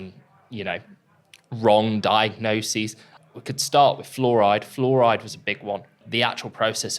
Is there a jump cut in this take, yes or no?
yes